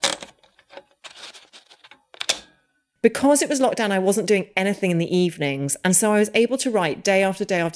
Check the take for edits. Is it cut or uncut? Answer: cut